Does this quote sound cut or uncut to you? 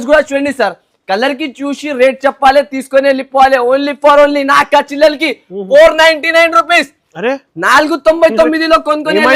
uncut